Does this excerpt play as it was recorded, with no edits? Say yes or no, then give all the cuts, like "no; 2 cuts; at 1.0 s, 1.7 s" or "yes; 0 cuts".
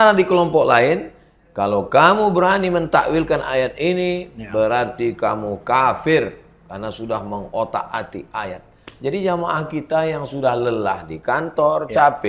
yes; 0 cuts